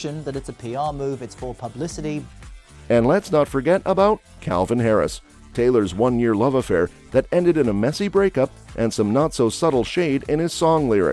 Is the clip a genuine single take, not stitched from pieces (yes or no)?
yes